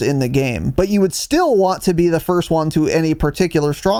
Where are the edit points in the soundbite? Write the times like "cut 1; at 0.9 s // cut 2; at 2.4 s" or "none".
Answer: none